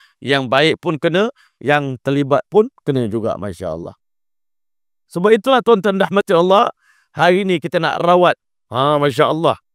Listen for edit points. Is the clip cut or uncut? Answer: uncut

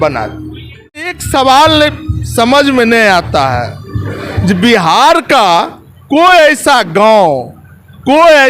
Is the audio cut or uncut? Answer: cut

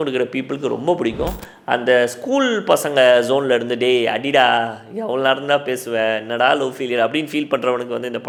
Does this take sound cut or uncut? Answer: uncut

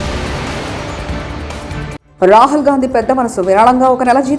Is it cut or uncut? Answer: cut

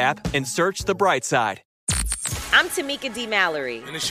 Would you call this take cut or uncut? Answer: cut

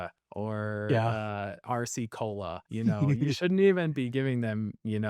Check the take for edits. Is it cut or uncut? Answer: uncut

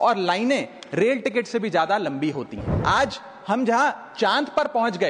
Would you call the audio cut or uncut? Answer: cut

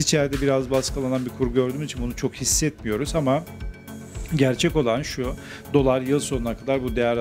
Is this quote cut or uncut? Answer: uncut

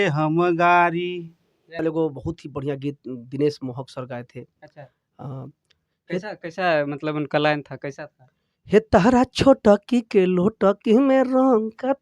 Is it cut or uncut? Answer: cut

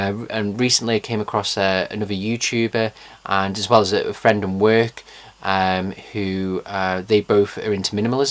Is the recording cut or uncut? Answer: cut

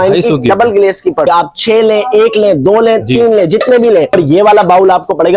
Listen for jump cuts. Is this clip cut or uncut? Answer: cut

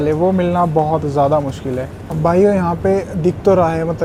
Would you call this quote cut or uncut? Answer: uncut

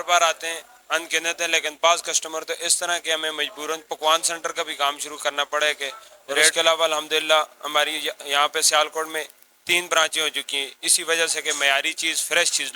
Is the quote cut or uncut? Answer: cut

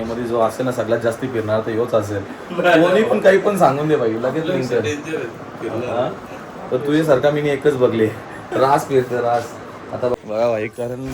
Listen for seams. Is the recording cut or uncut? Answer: cut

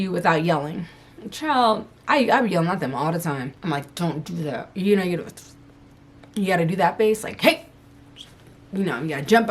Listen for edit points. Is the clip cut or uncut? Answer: cut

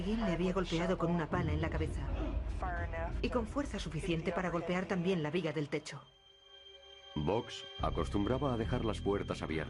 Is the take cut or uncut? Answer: uncut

